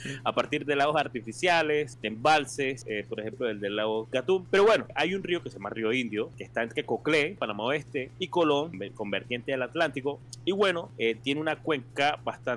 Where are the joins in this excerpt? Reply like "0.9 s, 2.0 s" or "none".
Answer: 2.0 s, 2.8 s, 4.2 s, 4.9 s, 6.4 s, 7.7 s, 8.8 s, 10.3 s, 10.9 s